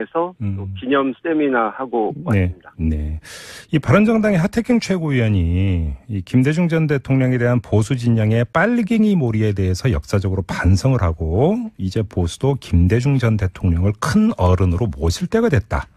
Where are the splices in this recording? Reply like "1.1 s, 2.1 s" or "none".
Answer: 14.8 s